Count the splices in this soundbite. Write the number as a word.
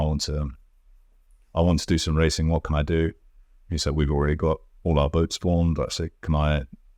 zero